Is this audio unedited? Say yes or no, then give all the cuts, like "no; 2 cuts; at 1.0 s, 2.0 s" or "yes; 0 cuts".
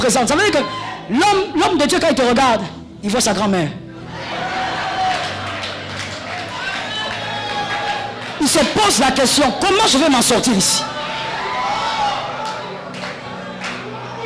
yes; 0 cuts